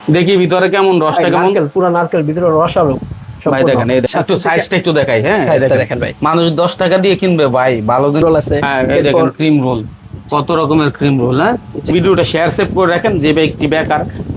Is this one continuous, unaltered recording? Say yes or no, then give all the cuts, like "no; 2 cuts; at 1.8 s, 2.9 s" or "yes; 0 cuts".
no; 3 cuts; at 4.1 s, 8.2 s, 11.9 s